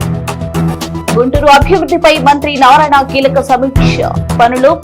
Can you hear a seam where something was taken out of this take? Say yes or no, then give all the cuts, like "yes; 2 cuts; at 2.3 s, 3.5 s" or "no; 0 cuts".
yes; 1 cut; at 0.9 s